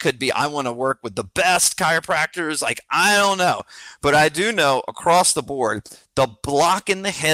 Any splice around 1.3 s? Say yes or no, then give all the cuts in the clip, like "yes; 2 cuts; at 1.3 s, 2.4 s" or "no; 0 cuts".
no; 1 cut; at 3.8 s